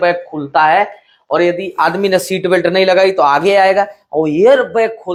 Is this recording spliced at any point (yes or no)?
no